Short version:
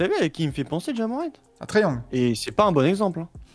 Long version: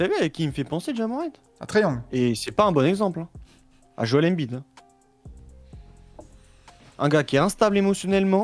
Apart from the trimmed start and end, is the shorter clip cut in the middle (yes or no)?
no